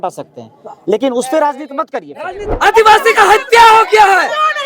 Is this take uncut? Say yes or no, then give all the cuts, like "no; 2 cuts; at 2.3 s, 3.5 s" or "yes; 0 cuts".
no; 1 cut; at 2.5 s